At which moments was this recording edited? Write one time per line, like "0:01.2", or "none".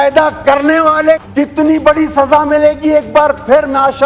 0:01.2